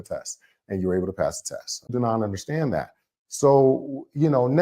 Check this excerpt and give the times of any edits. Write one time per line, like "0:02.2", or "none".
0:01.9